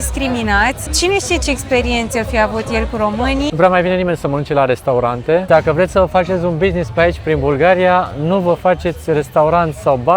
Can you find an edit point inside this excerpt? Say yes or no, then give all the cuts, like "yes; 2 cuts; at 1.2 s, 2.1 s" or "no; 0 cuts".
yes; 3 cuts; at 0.9 s, 3.5 s, 5.5 s